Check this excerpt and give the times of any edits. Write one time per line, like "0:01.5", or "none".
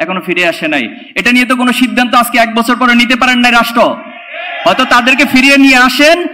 none